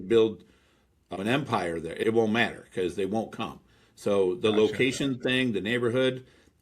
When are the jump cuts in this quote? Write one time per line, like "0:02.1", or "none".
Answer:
0:01.1